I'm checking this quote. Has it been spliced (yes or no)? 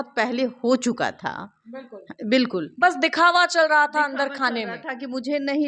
no